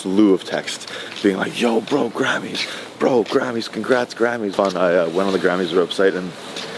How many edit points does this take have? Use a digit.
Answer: 1